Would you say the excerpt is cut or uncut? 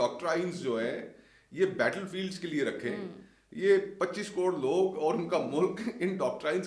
uncut